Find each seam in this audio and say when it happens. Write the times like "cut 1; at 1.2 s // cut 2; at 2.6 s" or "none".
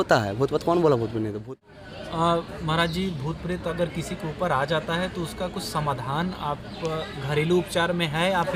cut 1; at 1.5 s